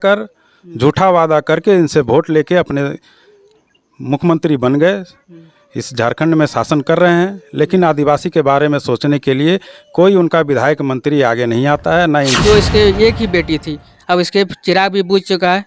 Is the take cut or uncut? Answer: cut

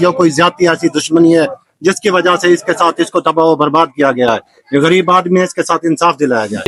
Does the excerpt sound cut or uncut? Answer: uncut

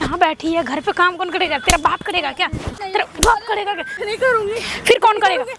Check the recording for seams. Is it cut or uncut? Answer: cut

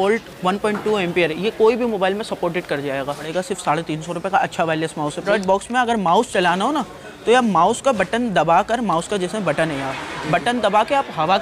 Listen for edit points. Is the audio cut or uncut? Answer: cut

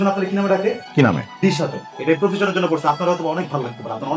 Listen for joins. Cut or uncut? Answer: cut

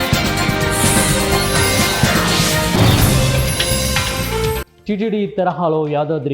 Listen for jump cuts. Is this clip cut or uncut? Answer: cut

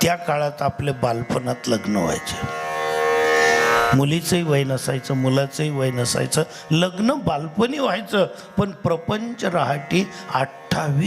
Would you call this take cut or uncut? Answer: uncut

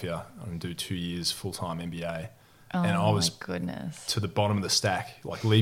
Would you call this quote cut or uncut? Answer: uncut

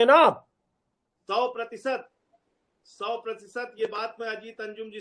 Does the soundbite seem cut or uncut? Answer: uncut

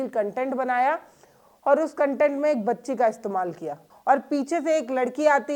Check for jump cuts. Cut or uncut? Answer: cut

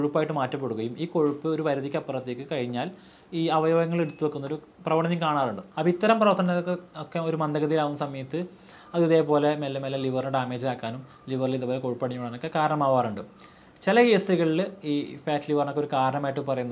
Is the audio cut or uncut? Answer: cut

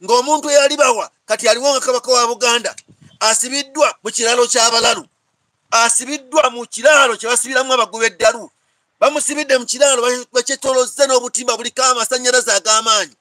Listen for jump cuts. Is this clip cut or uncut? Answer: uncut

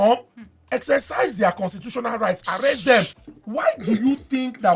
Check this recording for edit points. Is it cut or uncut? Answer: cut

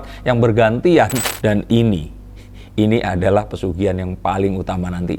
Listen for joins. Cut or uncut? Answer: cut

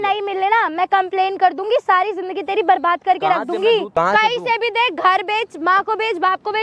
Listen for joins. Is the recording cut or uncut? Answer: cut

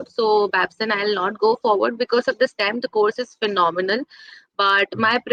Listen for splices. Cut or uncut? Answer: uncut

